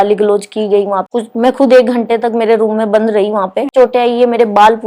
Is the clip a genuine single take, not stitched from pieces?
no; 2 cuts; at 1.0 s, 3.7 s

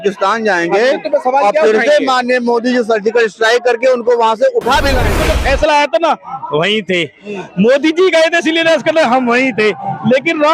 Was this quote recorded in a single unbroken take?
no; 1 cut; at 5.1 s

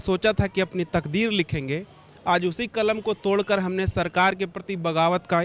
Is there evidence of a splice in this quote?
no; 0 cuts

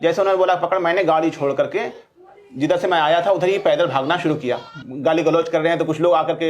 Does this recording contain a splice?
yes; 1 cut; at 4.7 s

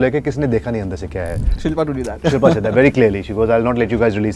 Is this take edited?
yes; 1 cut; at 1.5 s

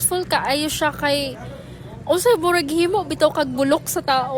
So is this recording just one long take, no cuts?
yes; 0 cuts

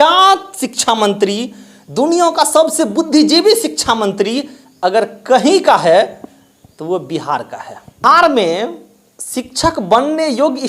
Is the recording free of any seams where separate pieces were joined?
no; 1 cut; at 8.0 s

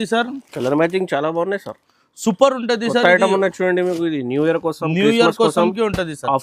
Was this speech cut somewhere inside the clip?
no; 0 cuts

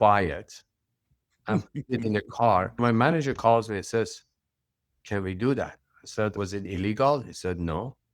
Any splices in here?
yes; 2 cuts; at 2.7 s, 6.4 s

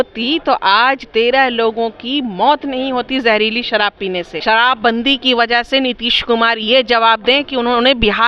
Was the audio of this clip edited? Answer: yes; 1 cut; at 4.3 s

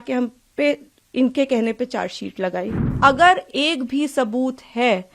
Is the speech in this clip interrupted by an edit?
yes; 1 cut; at 2.8 s

